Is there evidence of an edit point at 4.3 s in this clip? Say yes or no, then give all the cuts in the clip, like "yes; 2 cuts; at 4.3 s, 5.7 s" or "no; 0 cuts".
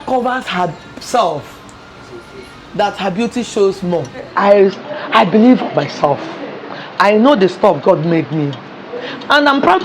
yes; 1 cut; at 4.3 s